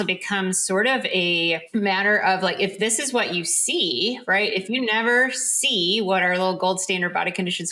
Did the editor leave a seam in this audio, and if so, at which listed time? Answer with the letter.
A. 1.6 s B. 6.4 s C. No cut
A